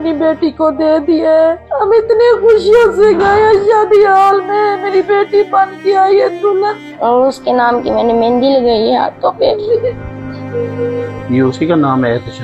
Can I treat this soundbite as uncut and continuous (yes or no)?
no